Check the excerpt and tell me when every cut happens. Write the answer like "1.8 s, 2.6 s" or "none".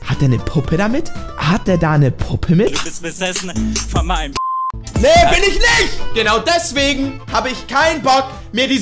2.8 s, 6.0 s